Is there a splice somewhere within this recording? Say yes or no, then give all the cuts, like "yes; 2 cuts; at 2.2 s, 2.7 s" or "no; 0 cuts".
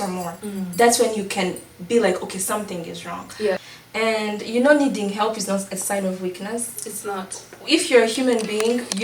yes; 1 cut; at 3.7 s